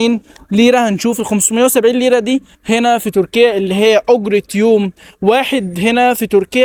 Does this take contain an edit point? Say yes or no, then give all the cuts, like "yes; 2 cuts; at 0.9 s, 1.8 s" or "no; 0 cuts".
no; 0 cuts